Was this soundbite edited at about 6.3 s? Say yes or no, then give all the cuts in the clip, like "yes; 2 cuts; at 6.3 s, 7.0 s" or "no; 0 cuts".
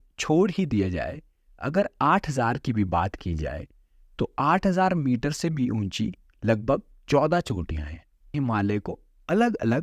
no; 1 cut; at 8.4 s